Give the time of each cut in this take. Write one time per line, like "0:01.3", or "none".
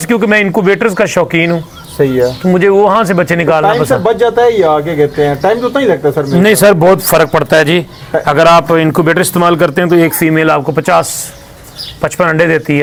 none